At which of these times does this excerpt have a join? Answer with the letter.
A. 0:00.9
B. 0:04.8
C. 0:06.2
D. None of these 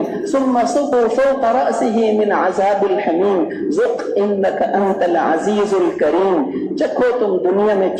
A